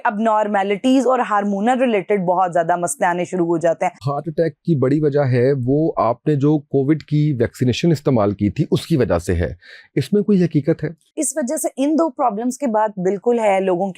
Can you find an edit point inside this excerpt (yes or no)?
yes